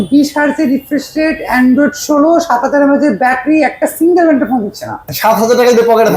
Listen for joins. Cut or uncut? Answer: cut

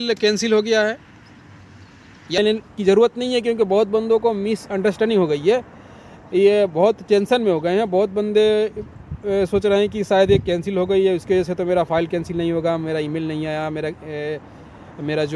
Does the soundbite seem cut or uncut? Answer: cut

